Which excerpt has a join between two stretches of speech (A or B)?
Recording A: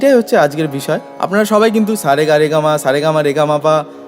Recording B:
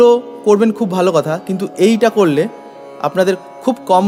A